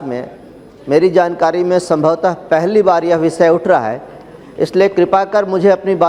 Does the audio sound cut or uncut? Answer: uncut